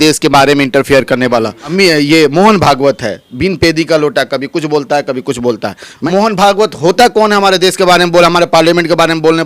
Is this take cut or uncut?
cut